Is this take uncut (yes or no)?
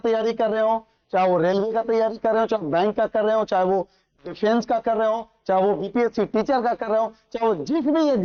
yes